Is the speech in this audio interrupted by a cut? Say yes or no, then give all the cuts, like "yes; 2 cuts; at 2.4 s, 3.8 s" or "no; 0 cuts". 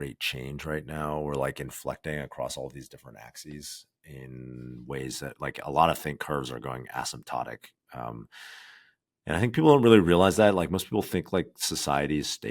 no; 0 cuts